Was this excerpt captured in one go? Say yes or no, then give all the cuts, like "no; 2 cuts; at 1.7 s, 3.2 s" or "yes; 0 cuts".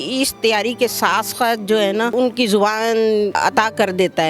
no; 2 cuts; at 2.1 s, 3.3 s